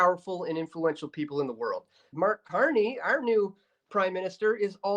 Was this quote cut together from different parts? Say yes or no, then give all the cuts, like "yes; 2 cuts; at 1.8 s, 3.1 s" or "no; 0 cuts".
yes; 1 cut; at 2.1 s